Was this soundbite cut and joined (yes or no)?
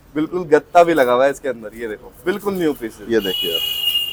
no